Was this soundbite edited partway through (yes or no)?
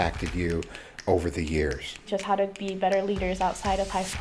yes